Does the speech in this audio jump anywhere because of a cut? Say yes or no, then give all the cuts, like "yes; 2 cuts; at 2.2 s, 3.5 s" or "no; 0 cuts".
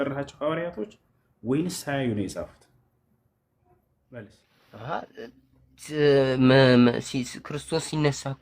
yes; 1 cut; at 4.5 s